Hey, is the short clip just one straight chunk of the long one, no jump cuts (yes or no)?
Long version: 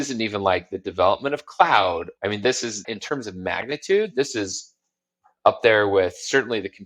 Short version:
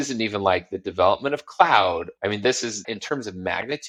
yes